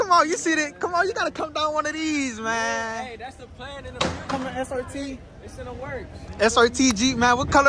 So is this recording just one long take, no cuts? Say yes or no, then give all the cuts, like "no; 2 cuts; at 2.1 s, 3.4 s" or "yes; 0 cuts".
yes; 0 cuts